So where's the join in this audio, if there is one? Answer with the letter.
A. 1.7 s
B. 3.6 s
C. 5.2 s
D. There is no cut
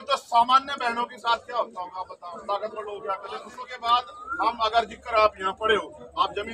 B